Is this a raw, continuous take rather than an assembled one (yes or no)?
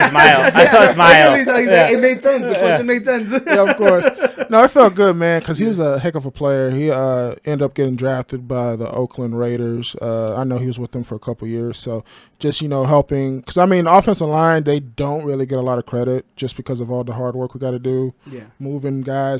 yes